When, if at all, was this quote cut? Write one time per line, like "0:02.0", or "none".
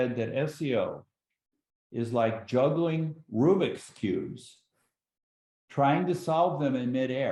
none